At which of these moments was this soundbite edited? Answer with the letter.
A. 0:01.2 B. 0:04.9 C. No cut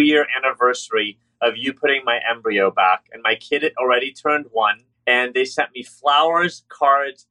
B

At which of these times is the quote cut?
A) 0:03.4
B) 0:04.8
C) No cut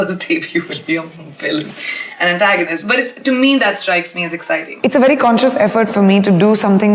B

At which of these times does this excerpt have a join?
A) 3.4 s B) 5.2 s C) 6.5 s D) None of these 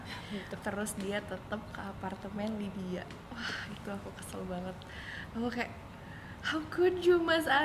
D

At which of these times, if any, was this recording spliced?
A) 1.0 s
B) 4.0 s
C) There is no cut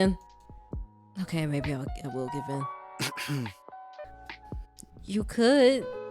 B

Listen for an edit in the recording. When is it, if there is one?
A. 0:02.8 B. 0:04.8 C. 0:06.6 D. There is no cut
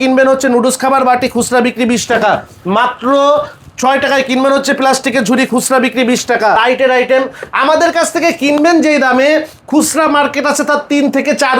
C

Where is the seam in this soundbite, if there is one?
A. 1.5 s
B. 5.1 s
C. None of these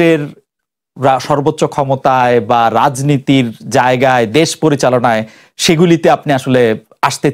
C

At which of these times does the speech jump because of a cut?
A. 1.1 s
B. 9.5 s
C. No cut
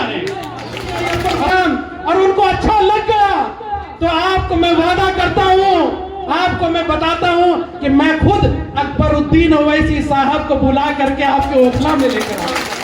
A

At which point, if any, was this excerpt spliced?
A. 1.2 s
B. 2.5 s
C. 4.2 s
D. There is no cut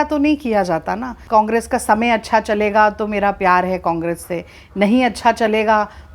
A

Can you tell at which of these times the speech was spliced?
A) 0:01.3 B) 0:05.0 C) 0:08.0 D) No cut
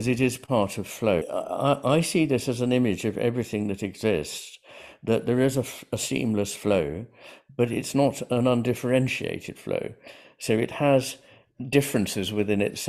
A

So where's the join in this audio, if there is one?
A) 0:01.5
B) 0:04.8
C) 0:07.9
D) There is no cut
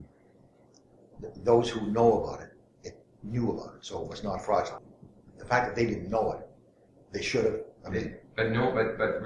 B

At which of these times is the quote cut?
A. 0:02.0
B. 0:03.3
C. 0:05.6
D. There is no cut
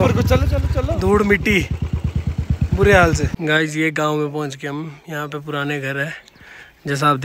B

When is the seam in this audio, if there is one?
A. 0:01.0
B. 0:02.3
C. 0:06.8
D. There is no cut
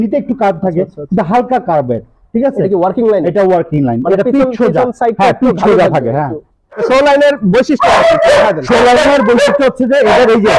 C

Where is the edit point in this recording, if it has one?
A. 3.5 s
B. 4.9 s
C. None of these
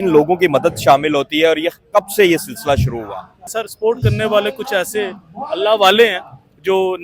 A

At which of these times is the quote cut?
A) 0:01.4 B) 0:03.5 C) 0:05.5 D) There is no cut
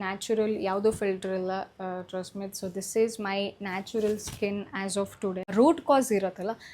C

